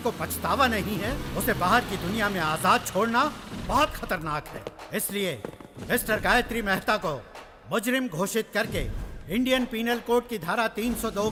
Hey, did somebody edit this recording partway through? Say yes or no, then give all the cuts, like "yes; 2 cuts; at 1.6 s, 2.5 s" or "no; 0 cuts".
no; 0 cuts